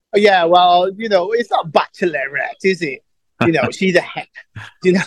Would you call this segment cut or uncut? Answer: uncut